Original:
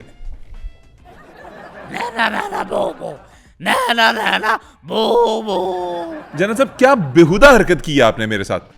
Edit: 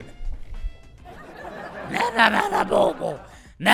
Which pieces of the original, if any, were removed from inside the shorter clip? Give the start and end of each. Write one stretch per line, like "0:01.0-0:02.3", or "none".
none